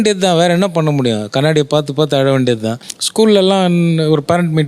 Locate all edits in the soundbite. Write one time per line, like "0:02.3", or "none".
none